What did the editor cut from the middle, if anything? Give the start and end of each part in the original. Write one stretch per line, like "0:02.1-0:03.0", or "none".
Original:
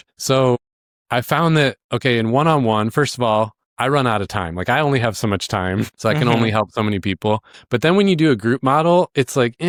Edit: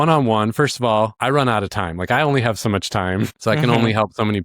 0:03.5-0:03.7